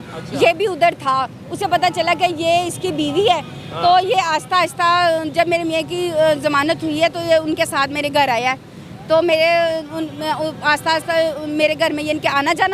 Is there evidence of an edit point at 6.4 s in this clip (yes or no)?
no